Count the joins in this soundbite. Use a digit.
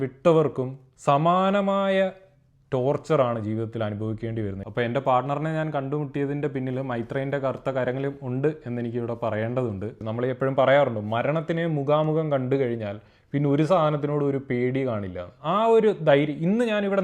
2